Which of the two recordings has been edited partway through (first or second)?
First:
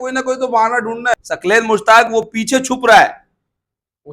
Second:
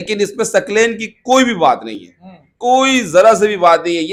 first